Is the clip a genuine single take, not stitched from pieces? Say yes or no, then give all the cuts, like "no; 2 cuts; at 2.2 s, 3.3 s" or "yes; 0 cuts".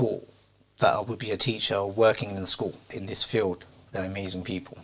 no; 1 cut; at 2.9 s